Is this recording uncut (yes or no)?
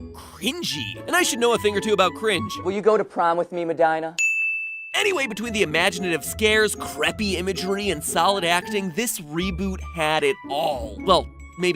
no